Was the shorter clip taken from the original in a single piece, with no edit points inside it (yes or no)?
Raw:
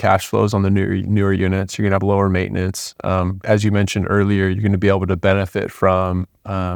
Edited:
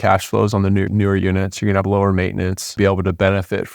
no